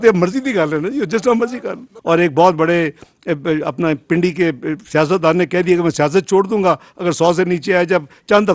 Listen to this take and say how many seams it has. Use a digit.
1